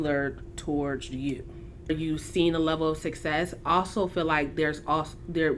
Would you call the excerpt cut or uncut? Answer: cut